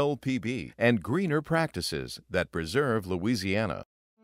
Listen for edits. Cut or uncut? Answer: uncut